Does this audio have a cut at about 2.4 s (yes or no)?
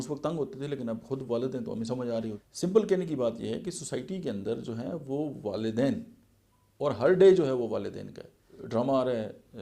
yes